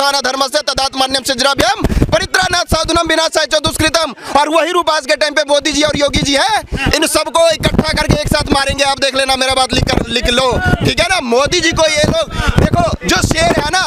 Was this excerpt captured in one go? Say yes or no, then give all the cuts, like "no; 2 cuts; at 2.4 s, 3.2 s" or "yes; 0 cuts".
yes; 0 cuts